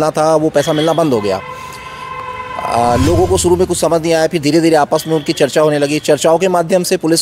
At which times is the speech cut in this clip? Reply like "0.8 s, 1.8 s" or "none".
none